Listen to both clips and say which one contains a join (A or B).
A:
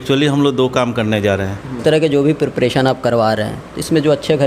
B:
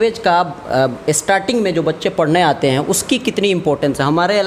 A